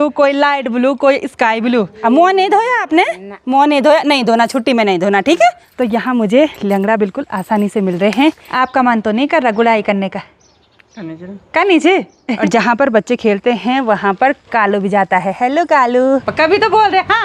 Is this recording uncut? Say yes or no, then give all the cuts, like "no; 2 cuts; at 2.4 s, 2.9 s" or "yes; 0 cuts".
no; 5 cuts; at 1.9 s, 5.6 s, 8.5 s, 12.4 s, 16.3 s